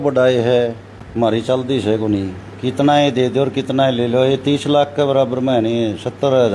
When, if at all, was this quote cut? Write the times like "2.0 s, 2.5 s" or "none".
none